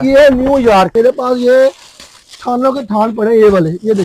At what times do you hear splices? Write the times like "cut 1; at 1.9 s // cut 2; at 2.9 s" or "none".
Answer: cut 1; at 0.9 s